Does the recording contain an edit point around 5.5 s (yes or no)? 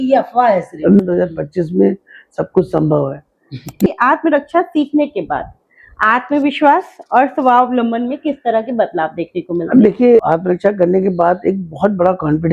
no